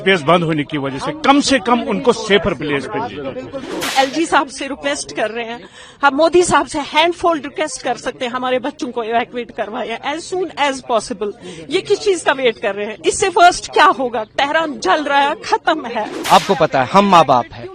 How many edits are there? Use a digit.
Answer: 2